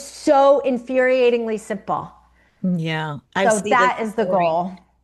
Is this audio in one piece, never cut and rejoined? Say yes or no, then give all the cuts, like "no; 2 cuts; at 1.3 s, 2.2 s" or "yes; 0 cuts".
yes; 0 cuts